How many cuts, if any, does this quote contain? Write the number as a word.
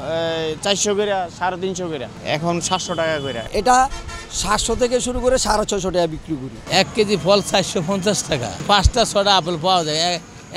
three